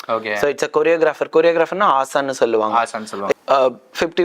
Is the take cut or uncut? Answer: cut